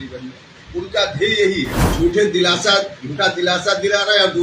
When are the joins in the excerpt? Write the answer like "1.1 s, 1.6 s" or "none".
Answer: 1.8 s